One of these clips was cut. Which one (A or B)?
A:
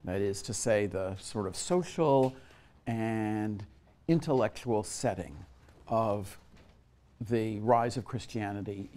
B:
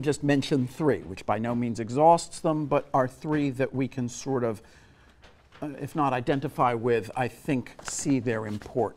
B